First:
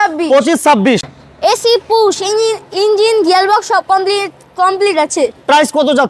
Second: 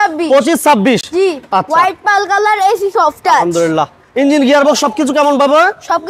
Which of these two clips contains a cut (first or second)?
first